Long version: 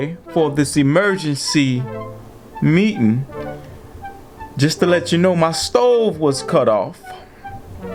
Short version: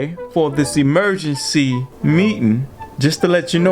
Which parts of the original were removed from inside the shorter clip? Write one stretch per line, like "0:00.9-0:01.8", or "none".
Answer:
0:01.9-0:02.5
0:03.4-0:04.4